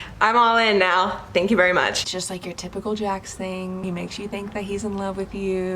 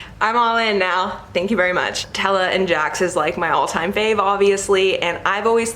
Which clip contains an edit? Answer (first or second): first